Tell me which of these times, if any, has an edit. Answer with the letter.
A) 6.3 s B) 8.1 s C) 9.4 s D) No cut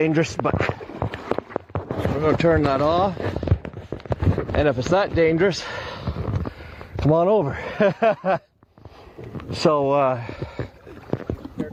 D